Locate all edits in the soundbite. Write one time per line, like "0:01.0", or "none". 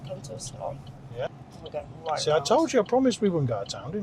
0:01.3